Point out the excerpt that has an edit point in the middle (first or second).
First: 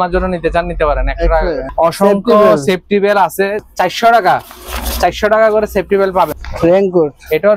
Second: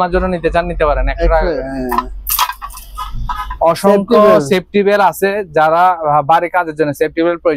first